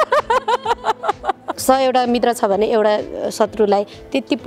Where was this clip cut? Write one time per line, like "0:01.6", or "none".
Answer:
0:01.5

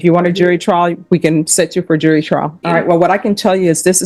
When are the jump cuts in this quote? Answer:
0:02.6

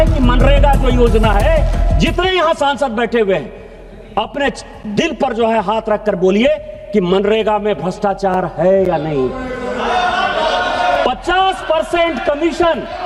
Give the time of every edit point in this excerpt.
none

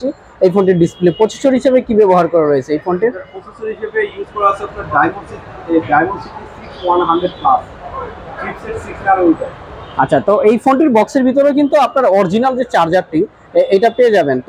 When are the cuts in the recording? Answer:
none

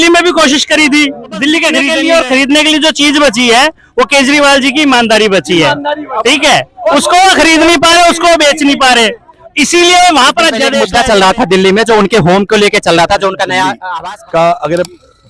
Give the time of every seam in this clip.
0:01.9
0:10.8
0:13.8

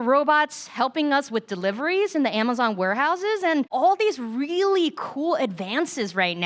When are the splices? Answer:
0:03.7

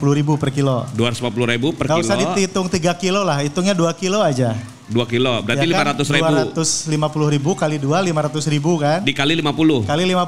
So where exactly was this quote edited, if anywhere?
none

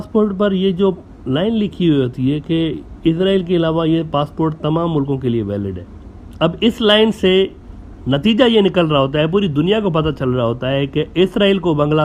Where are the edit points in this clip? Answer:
none

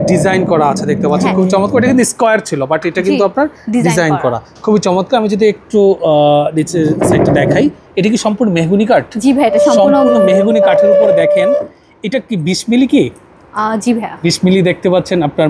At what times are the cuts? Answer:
none

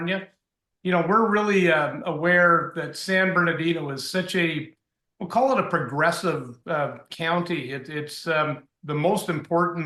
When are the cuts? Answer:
none

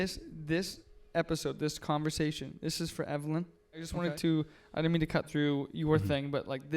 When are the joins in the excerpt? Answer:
0:03.9

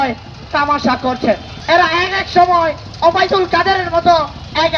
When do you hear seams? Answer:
0:01.5

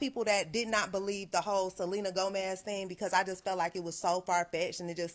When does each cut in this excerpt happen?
none

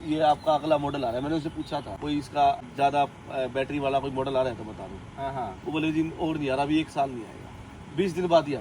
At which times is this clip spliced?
0:01.9
0:02.7

